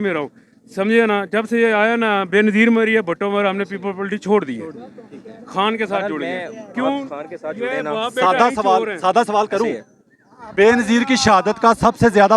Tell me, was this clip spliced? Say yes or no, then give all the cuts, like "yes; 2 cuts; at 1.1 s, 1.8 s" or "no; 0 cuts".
no; 0 cuts